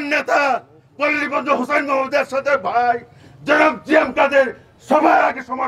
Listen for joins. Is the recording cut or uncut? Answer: uncut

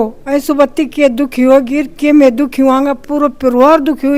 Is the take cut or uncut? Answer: uncut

